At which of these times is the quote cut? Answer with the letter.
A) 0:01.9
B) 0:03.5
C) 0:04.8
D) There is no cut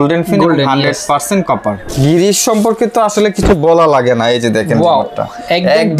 A